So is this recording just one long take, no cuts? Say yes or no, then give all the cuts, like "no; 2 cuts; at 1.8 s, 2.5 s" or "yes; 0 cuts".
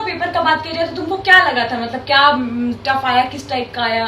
yes; 0 cuts